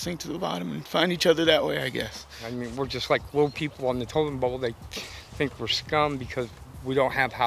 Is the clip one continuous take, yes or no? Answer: no